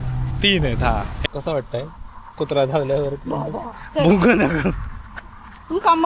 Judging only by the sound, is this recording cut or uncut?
cut